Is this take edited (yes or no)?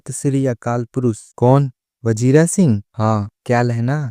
yes